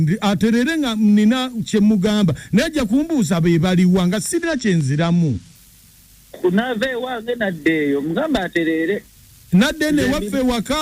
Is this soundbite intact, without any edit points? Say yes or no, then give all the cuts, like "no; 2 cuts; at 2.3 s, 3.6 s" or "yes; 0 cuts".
yes; 0 cuts